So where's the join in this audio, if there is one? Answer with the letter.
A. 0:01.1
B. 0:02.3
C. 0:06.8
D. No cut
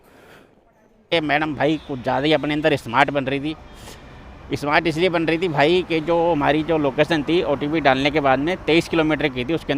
A